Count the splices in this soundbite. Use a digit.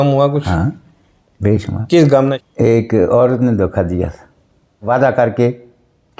2